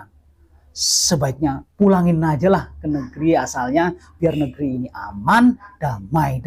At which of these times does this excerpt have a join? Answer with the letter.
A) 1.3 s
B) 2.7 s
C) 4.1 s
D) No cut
D